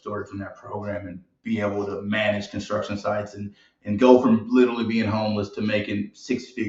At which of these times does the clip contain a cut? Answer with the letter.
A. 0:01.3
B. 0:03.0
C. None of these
C